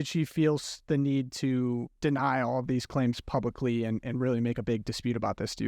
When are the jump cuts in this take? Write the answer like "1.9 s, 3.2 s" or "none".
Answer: 1.9 s